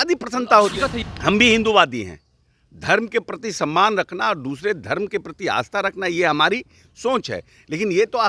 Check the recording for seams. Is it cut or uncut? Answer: cut